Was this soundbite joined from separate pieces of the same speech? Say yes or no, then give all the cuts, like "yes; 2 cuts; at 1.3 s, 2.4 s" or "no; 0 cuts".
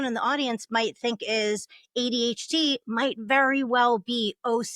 no; 0 cuts